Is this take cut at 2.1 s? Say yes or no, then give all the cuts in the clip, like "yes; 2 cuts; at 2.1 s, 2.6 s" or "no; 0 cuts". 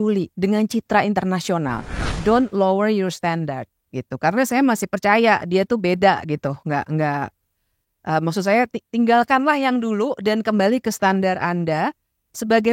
yes; 1 cut; at 2.1 s